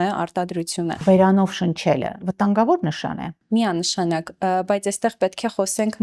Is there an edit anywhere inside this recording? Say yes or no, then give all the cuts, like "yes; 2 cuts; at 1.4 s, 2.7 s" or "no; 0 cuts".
yes; 2 cuts; at 1.0 s, 3.3 s